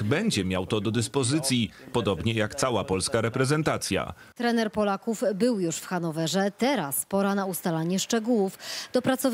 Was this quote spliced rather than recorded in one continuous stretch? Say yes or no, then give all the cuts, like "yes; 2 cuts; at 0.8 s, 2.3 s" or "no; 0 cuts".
yes; 1 cut; at 4.2 s